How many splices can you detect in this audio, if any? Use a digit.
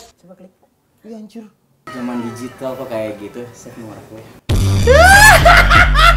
1